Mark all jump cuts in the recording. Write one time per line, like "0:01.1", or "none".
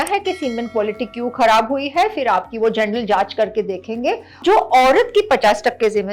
0:04.4